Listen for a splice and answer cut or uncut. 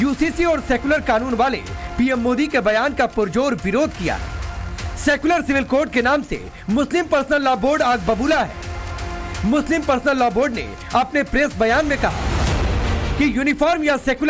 uncut